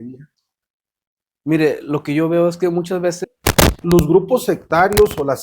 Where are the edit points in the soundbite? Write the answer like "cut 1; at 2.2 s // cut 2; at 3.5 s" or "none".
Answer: cut 1; at 3.2 s